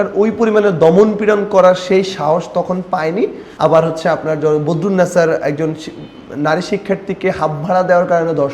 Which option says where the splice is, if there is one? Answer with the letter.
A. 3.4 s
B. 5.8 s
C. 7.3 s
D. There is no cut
A